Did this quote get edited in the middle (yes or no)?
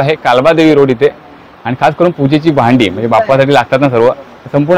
no